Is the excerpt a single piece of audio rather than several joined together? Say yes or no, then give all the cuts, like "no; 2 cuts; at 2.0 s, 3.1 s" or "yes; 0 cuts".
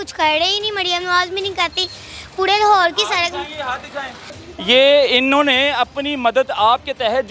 no; 1 cut; at 4.3 s